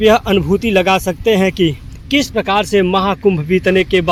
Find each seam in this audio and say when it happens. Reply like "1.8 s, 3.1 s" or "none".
none